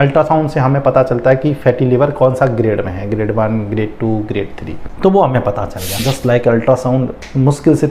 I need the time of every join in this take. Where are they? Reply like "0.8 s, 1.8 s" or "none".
6.1 s